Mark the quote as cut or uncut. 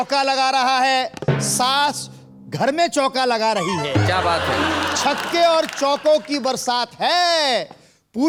uncut